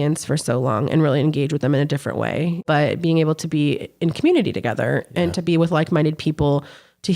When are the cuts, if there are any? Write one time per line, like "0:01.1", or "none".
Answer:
0:02.6